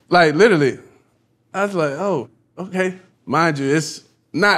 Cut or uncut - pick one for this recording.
cut